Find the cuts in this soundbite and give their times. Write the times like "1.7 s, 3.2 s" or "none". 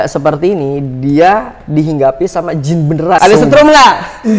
3.2 s